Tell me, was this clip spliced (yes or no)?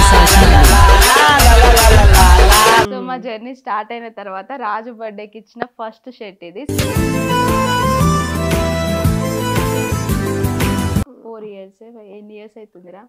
yes